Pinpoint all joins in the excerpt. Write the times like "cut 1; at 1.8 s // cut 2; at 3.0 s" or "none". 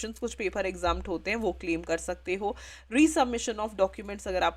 none